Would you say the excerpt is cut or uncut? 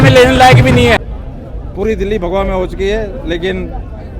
cut